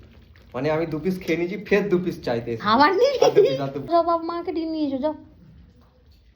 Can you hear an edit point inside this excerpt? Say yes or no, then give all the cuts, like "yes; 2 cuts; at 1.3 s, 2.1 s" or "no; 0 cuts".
yes; 1 cut; at 3.9 s